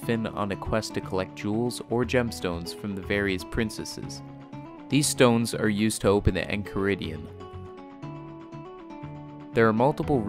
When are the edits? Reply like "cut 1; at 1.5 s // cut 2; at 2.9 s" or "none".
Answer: none